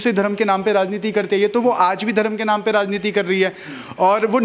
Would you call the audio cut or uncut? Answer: uncut